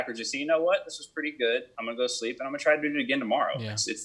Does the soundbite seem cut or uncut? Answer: cut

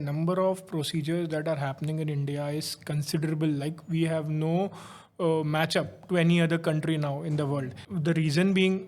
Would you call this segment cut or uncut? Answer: cut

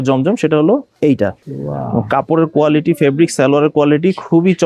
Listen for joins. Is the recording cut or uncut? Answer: uncut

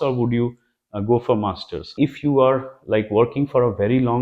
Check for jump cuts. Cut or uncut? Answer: cut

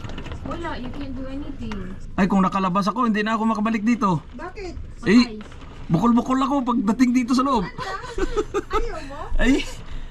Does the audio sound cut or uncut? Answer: cut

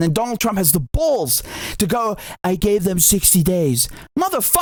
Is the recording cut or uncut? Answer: uncut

